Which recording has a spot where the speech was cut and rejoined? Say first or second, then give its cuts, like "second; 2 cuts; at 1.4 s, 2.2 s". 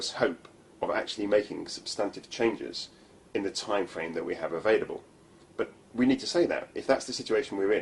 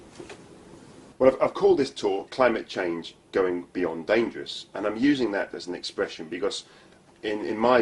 first; 1 cut; at 2.7 s